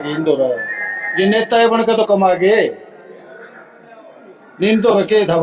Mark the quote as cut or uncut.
uncut